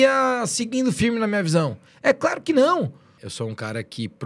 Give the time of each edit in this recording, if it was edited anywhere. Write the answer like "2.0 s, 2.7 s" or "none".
3.2 s